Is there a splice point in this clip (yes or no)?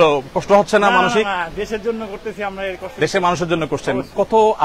no